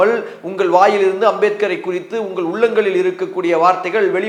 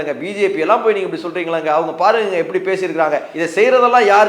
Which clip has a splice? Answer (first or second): second